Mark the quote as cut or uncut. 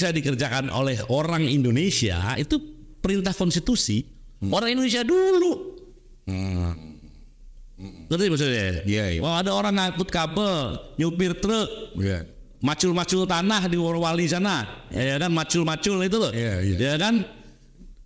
uncut